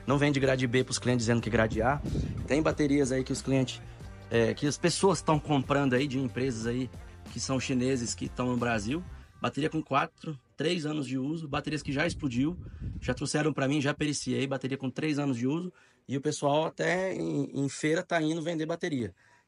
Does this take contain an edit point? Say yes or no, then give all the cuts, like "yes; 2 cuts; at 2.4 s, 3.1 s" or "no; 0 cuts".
no; 0 cuts